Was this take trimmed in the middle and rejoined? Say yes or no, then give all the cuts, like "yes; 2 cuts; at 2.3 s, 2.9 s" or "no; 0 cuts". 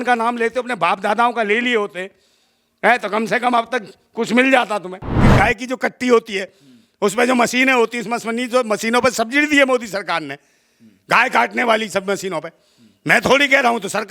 yes; 1 cut; at 5.2 s